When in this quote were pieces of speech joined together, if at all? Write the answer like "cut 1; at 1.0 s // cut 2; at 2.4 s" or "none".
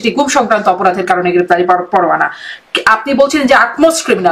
none